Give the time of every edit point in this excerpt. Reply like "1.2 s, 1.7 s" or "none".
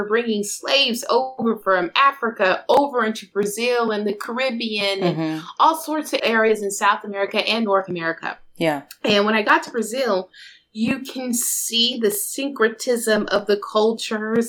6.2 s